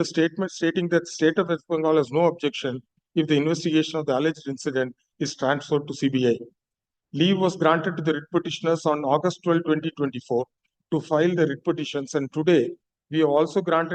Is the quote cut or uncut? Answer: uncut